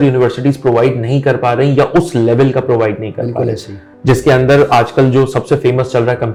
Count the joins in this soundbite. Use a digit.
0